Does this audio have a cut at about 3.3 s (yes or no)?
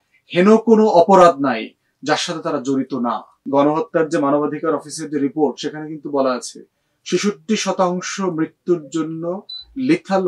yes